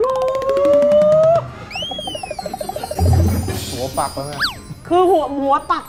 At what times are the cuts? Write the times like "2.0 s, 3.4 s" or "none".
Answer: none